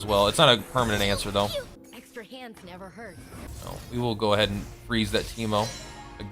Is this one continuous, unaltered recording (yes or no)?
no